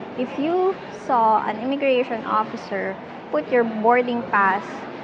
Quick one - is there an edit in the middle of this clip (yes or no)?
no